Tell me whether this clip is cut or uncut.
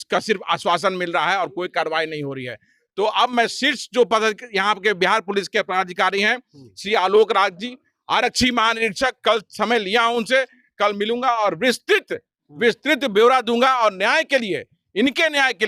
uncut